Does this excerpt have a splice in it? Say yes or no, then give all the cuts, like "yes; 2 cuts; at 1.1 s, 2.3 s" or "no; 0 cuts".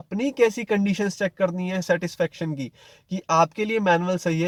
no; 0 cuts